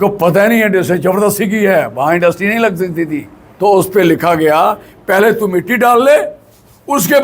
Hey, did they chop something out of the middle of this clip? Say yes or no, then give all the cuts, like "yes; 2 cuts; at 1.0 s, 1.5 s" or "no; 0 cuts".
yes; 1 cut; at 3.4 s